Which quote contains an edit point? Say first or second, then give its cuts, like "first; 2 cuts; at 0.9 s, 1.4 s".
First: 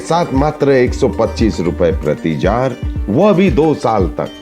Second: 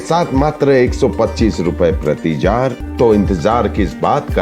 second; 1 cut; at 2.8 s